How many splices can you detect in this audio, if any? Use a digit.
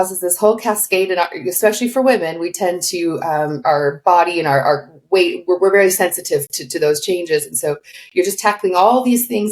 2